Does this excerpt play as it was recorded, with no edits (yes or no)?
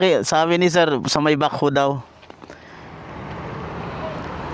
no